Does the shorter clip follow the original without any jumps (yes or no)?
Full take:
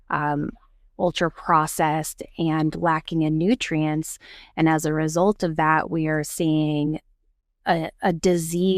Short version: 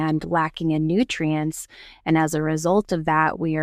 yes